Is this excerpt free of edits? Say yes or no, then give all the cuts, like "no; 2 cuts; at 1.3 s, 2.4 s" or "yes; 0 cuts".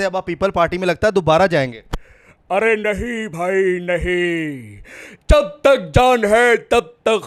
yes; 0 cuts